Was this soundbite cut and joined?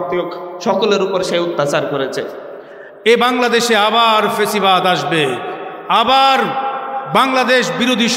yes; 1 cut; at 2.9 s

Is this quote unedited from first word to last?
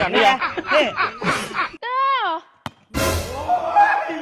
no; 1 cut; at 1.7 s

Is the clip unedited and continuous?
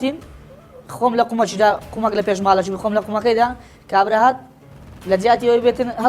yes; 0 cuts

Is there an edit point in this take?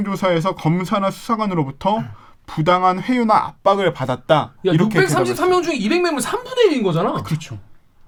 no; 0 cuts

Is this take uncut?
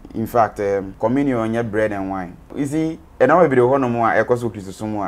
no; 2 cuts; at 0.9 s, 2.5 s

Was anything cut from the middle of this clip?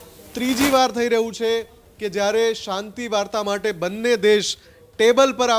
no; 0 cuts

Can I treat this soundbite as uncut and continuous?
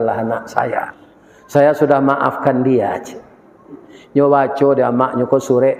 yes; 0 cuts

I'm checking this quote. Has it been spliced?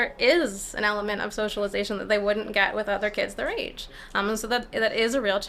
no; 0 cuts

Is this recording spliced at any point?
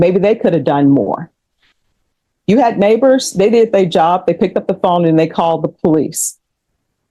no; 0 cuts

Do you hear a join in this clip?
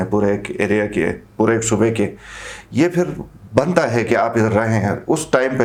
no; 0 cuts

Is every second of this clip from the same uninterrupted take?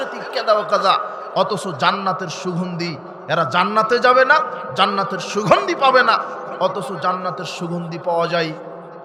yes; 0 cuts

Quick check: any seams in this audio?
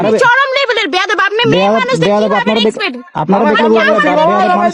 no; 0 cuts

